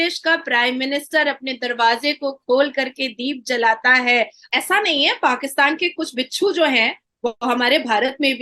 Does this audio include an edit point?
yes; 1 cut; at 4.4 s

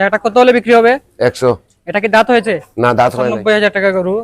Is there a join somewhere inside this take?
yes; 1 cut; at 3.3 s

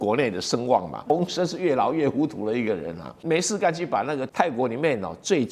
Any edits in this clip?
yes; 3 cuts; at 1.1 s, 3.1 s, 4.3 s

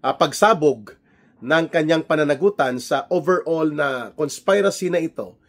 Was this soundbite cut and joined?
no; 0 cuts

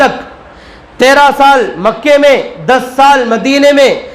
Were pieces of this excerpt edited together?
no; 0 cuts

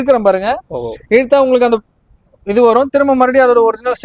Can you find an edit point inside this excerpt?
no; 0 cuts

